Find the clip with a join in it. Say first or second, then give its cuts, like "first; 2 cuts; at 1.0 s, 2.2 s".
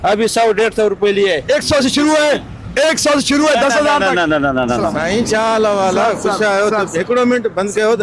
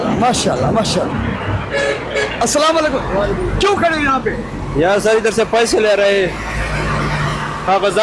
first; 2 cuts; at 1.4 s, 4.8 s